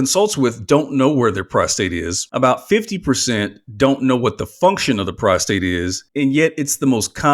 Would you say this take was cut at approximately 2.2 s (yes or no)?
yes